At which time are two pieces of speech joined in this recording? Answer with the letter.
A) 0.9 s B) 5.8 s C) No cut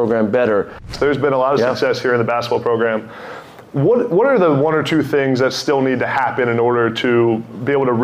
A